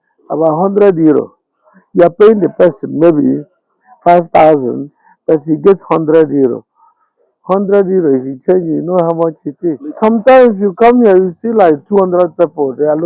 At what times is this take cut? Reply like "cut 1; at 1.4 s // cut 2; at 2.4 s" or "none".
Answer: cut 1; at 9.9 s